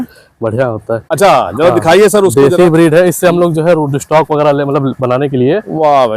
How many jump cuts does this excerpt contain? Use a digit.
1